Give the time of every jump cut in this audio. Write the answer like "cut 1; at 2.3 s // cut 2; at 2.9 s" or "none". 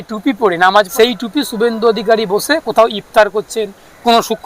cut 1; at 0.9 s